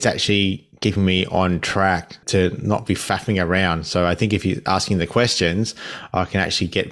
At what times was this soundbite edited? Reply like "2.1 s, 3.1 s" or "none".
2.1 s